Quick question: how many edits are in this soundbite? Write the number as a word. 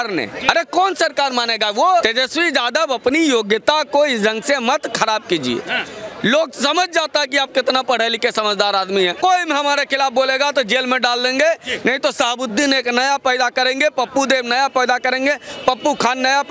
two